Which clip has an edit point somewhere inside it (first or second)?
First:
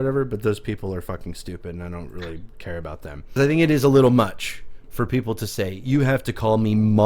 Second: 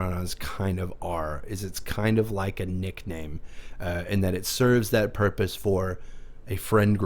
first